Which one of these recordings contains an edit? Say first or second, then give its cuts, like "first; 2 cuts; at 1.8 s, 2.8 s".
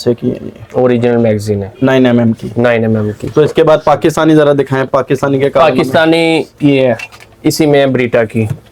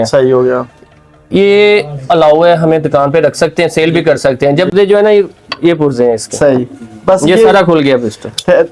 second; 1 cut; at 4.7 s